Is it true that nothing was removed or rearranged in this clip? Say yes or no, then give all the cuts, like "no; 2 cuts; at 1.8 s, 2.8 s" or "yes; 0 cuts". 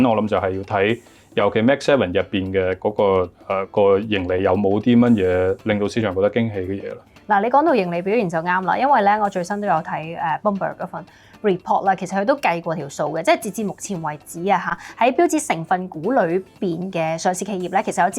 yes; 0 cuts